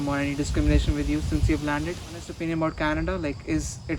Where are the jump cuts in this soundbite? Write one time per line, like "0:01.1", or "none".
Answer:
0:02.3